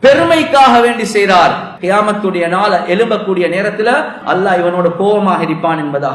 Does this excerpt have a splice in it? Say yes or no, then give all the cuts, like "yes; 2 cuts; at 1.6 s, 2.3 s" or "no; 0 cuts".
yes; 2 cuts; at 1.7 s, 4.2 s